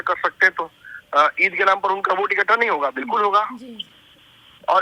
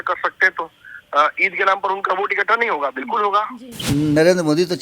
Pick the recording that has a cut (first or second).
second